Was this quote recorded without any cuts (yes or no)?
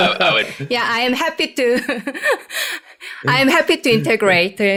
yes